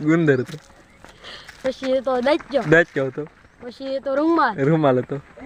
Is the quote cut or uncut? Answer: uncut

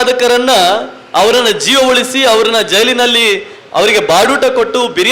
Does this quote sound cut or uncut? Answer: uncut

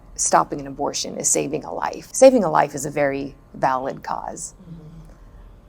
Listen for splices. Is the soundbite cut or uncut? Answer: cut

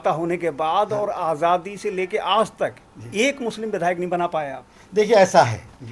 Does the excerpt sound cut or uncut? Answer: uncut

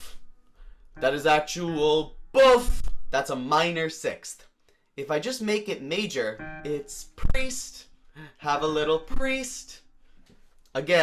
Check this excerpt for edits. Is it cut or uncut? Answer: cut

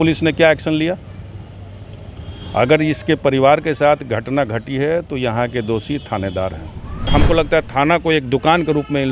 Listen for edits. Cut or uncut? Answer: cut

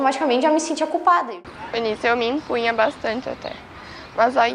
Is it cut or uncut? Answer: cut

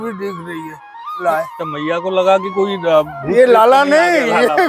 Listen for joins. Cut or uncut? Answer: cut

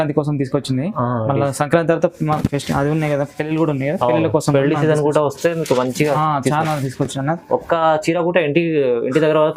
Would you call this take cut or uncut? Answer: uncut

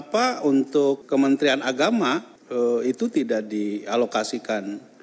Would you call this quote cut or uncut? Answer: cut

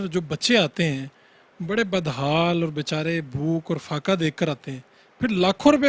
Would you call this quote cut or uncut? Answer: uncut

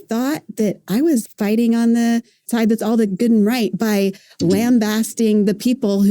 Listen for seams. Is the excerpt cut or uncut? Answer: cut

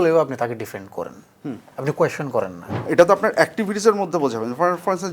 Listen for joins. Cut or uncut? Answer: cut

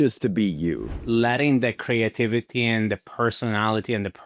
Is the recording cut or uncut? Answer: cut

